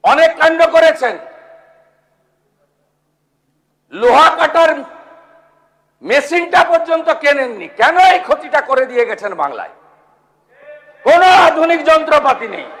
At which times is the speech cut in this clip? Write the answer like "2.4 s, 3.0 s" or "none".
none